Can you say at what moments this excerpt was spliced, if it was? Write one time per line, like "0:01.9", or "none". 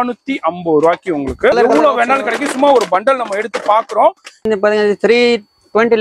0:01.5
0:04.5